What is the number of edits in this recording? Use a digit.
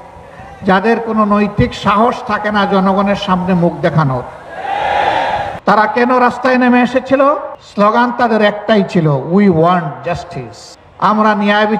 2